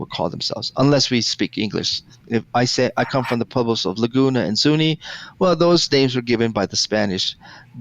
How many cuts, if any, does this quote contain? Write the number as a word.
one